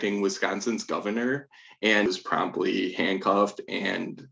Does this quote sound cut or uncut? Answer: cut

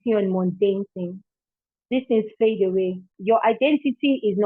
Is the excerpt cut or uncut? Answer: cut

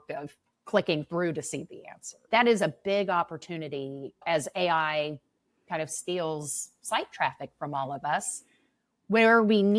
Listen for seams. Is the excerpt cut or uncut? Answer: cut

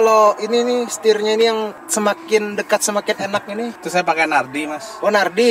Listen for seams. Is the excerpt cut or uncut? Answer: uncut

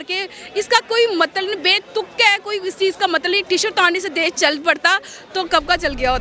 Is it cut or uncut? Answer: uncut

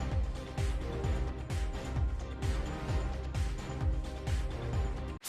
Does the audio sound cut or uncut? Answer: uncut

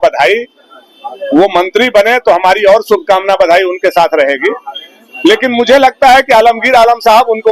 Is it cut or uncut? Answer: uncut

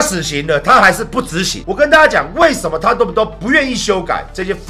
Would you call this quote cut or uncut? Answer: cut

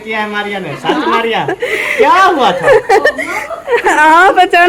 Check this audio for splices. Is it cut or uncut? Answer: uncut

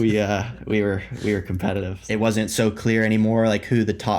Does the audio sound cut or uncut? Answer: cut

